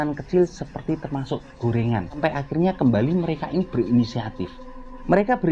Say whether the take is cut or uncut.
uncut